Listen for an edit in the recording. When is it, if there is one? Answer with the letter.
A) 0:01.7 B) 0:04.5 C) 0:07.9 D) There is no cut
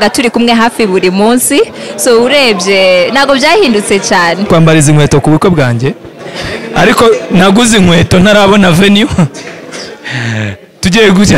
B